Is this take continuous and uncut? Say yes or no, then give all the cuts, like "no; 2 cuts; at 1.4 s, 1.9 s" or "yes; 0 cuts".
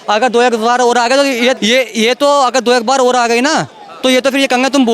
no; 1 cut; at 1.6 s